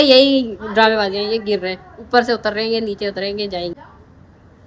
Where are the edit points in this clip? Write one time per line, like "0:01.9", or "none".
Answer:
0:03.7